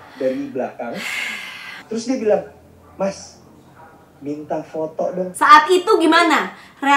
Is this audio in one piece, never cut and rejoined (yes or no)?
no